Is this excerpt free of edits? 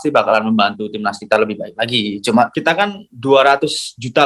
no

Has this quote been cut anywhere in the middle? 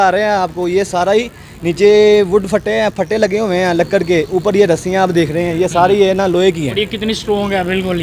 no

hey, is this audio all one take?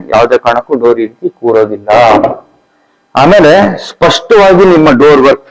yes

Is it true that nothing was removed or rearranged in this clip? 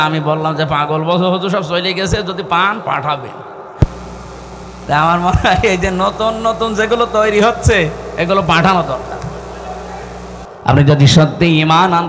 no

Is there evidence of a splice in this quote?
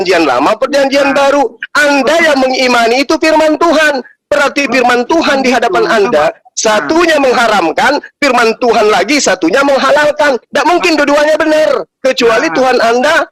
no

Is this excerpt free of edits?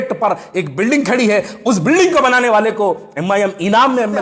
yes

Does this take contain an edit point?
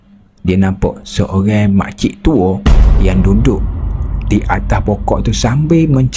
no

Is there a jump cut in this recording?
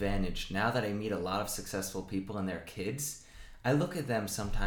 no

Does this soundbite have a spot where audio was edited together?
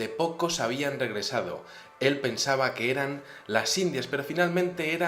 yes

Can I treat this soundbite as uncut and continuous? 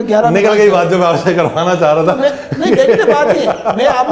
yes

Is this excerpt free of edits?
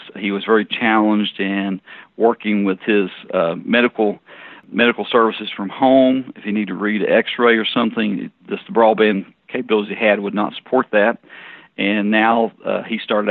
yes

